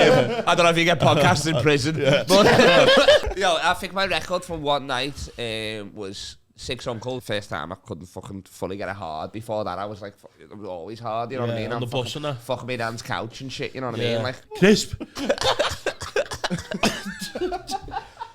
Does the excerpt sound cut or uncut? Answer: cut